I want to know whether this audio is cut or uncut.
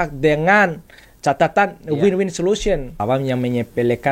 cut